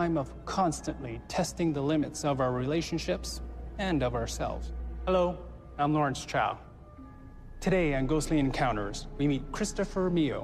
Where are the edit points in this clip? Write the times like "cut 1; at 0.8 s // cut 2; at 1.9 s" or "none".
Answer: cut 1; at 6.4 s